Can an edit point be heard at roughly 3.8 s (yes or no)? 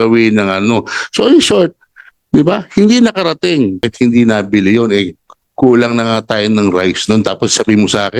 yes